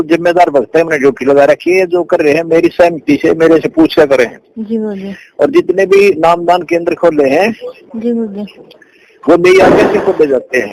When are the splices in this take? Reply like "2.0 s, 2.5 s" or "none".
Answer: none